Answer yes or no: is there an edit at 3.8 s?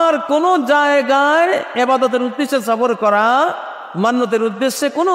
no